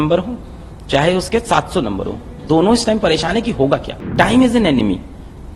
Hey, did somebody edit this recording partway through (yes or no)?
yes